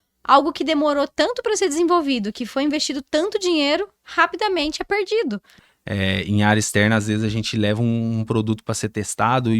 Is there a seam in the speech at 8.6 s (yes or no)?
no